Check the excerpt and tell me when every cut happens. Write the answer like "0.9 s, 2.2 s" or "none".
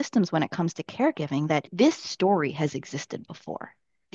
1.7 s